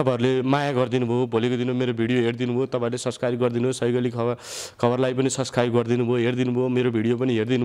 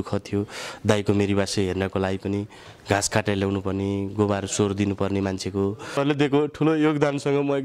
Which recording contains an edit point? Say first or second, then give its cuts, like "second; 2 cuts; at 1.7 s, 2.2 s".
second; 1 cut; at 6.0 s